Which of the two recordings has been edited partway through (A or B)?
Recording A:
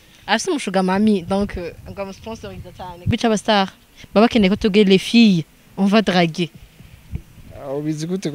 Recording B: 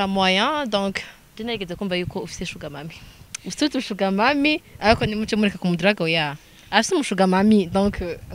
A